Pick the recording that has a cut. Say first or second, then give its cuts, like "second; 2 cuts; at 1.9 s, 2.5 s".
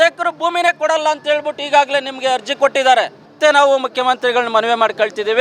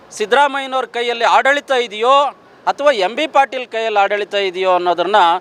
first; 1 cut; at 3.3 s